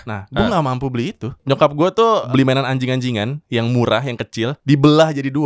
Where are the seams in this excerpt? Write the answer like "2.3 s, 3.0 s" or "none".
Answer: 1.3 s, 2.3 s, 4.6 s